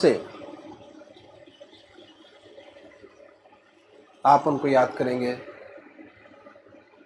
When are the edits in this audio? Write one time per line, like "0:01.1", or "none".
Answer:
none